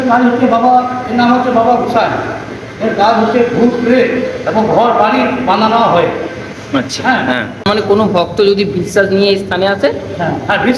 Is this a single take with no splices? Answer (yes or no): no